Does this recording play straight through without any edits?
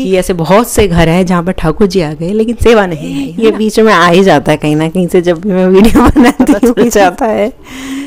no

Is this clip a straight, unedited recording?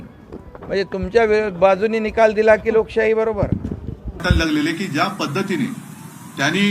no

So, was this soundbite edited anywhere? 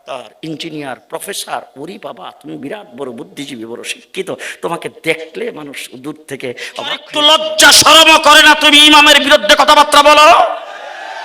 yes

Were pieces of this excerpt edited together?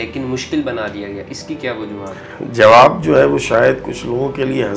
no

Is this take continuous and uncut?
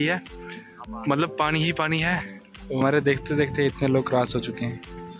no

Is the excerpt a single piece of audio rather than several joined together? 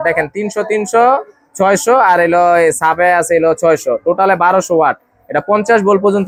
yes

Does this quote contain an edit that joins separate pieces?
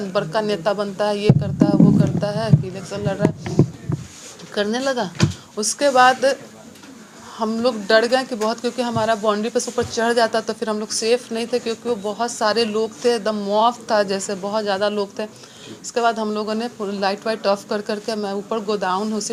no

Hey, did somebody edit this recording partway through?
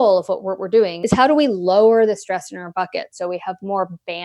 yes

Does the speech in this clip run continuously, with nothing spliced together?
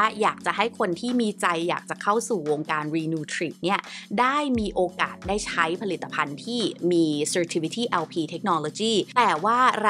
yes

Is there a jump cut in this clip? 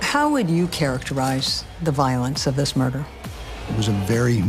yes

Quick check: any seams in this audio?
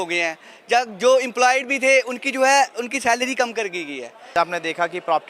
yes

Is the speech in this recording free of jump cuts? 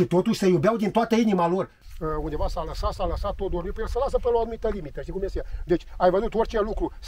no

